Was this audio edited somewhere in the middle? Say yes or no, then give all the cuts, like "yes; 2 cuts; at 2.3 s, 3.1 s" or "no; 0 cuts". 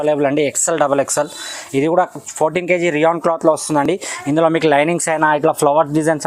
no; 0 cuts